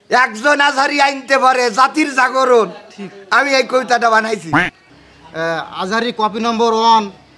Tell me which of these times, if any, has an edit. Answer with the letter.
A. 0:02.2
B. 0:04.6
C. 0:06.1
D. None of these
B